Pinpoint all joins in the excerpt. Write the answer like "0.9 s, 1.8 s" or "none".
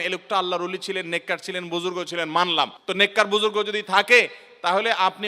2.8 s